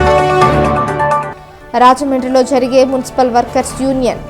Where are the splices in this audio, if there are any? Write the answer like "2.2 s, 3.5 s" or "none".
1.3 s

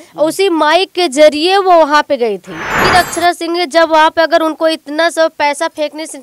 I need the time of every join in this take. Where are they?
2.8 s

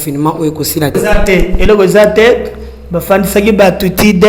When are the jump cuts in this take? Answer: 0.9 s

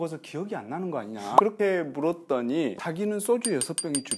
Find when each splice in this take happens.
1.3 s, 2.9 s

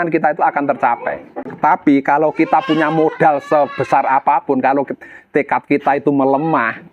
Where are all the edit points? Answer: 1.5 s

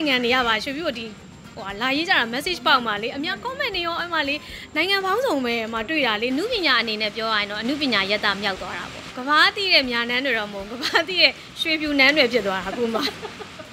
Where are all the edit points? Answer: 6.3 s, 9.1 s

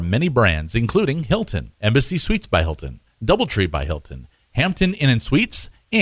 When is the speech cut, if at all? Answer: 1.3 s

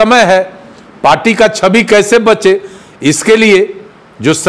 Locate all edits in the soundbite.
none

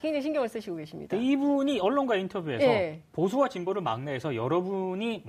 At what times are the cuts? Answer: 1.3 s

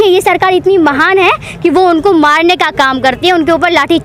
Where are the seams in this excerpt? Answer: none

